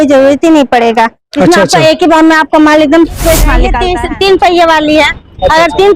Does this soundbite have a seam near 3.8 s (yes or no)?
yes